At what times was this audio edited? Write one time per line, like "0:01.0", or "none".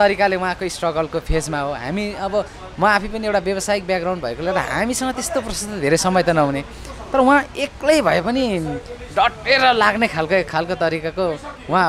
none